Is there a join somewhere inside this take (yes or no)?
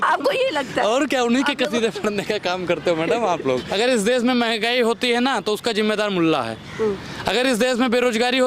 yes